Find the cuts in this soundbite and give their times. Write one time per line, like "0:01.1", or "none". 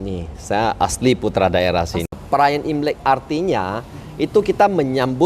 0:02.1

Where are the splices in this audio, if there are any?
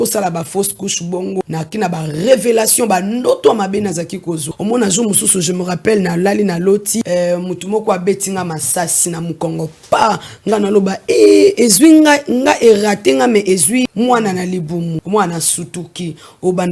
0:01.4
0:04.5
0:07.0
0:09.0
0:13.9
0:15.0

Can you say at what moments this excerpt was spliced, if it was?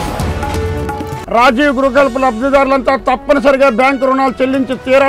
0:01.2

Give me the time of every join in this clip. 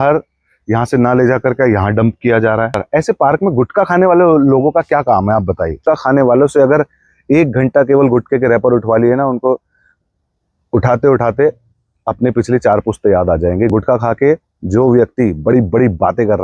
0:02.8
0:05.8
0:13.7

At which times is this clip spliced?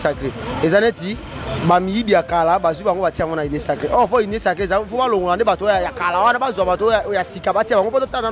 none

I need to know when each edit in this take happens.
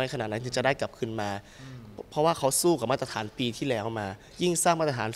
none

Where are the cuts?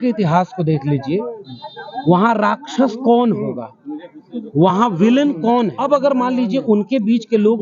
0:05.8

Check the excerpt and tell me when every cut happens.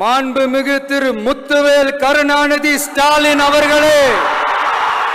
none

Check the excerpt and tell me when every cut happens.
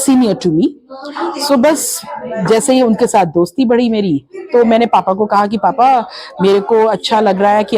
none

